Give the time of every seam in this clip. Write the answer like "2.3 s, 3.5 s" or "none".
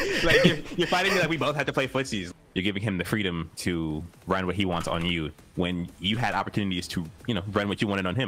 2.2 s, 3.8 s, 5.4 s, 7.1 s